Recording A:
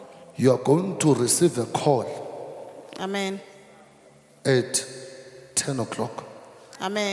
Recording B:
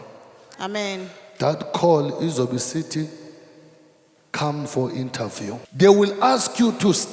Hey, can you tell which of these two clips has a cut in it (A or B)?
B